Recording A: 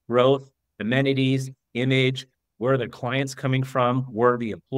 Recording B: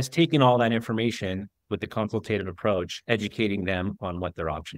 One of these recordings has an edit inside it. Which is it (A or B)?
B